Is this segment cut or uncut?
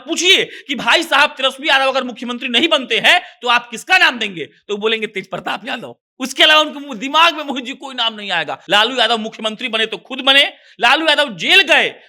cut